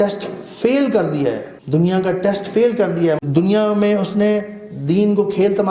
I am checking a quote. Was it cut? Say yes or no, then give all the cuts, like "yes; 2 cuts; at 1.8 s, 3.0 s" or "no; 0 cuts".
yes; 1 cut; at 1.5 s